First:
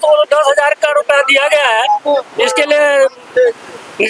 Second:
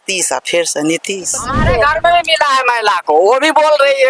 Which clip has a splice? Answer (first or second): second